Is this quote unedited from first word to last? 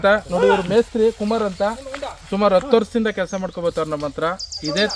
yes; 0 cuts

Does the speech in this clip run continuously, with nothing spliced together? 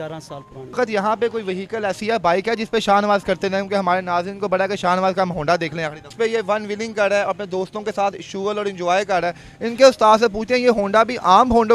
no; 2 cuts; at 0.8 s, 6.0 s

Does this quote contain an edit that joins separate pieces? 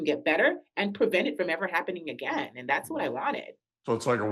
no; 0 cuts

